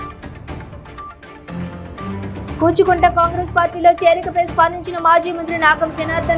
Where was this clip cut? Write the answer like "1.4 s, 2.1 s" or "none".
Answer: 2.6 s